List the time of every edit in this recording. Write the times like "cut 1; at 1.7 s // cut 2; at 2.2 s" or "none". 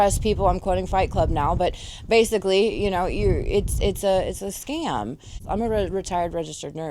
cut 1; at 5.4 s

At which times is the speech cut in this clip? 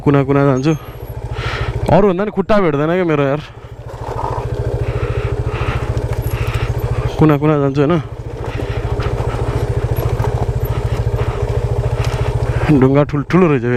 none

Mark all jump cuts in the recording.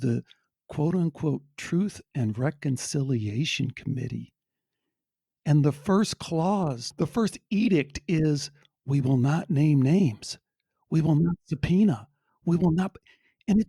none

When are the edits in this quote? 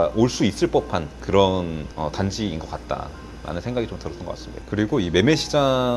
none

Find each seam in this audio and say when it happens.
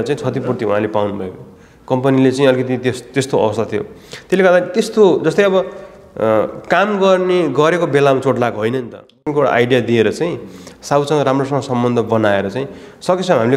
cut 1; at 9.2 s

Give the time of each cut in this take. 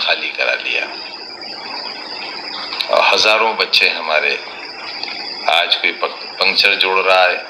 none

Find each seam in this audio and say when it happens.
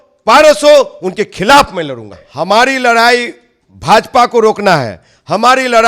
cut 1; at 2.2 s

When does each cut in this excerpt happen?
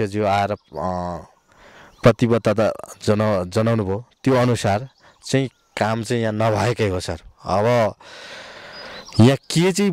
none

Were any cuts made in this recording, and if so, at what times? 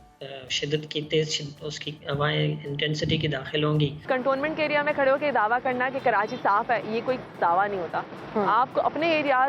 cut 1; at 4.1 s

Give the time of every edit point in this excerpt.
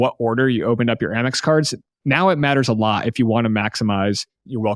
none

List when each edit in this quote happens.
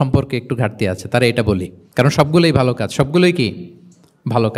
cut 1; at 1.8 s

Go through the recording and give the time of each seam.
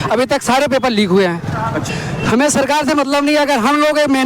cut 1; at 1.8 s

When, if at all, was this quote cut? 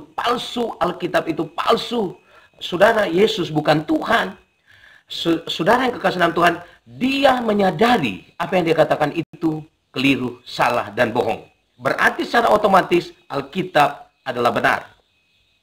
cut 1; at 1.1 s

